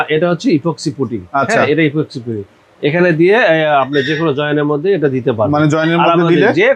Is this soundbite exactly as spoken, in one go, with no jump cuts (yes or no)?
yes